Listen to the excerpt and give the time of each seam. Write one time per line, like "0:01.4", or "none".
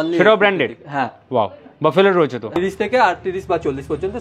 0:02.6